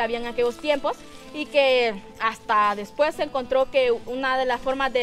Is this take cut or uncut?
uncut